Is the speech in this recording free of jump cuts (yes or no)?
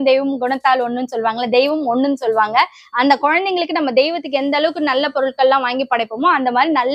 yes